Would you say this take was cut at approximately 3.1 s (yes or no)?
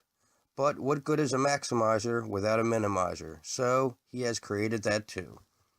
yes